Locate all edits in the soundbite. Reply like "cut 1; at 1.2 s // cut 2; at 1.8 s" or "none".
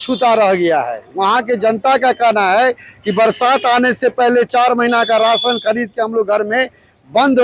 none